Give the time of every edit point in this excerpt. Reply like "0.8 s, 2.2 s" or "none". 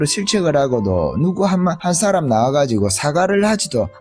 1.8 s